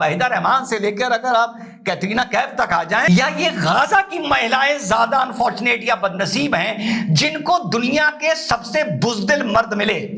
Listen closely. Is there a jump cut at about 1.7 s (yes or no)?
no